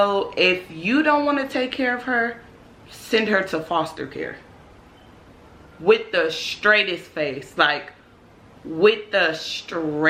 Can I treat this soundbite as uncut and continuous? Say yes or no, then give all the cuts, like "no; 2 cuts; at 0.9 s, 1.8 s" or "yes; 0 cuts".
yes; 0 cuts